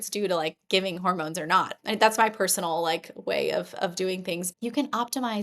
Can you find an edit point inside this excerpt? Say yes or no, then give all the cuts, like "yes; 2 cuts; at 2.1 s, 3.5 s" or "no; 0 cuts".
yes; 2 cuts; at 1.7 s, 4.5 s